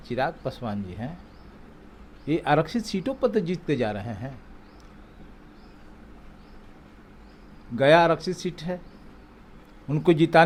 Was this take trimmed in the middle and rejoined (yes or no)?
no